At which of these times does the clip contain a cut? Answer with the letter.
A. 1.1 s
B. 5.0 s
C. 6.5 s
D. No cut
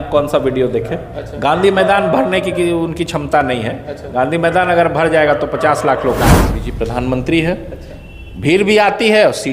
C